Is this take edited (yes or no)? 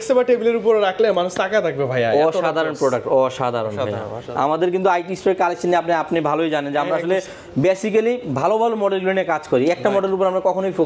no